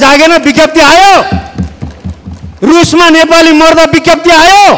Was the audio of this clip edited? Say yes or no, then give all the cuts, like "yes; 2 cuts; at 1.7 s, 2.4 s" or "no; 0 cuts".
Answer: no; 0 cuts